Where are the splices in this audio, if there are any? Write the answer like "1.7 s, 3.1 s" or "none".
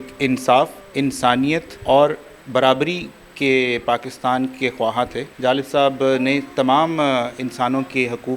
1.2 s, 5.2 s